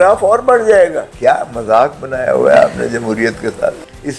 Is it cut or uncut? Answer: cut